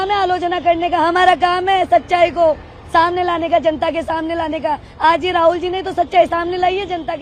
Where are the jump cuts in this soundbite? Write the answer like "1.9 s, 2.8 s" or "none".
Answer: none